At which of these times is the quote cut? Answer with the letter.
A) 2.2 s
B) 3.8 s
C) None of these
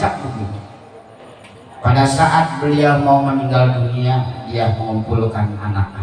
C